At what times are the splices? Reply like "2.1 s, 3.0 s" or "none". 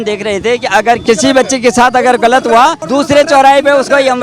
1.0 s, 2.8 s